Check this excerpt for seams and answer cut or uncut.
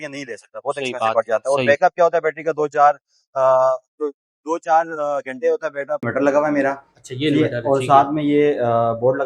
cut